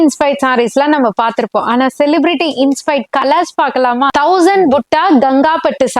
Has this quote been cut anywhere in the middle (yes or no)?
yes